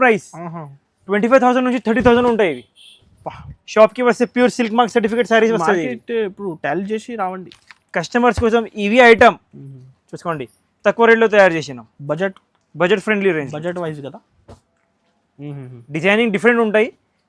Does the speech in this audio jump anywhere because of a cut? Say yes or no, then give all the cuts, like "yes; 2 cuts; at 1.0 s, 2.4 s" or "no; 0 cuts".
no; 0 cuts